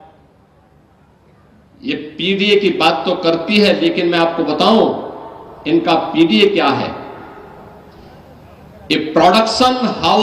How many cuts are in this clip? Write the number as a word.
zero